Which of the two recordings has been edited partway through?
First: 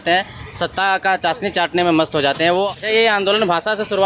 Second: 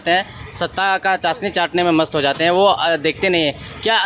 first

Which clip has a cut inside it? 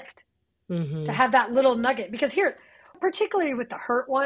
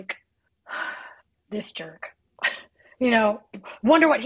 first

